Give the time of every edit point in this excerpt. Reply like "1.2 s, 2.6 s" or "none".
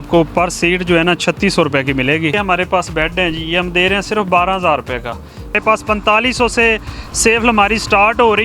2.3 s, 5.6 s